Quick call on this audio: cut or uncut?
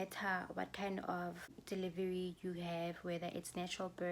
cut